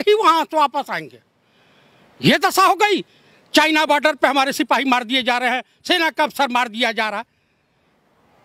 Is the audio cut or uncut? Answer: uncut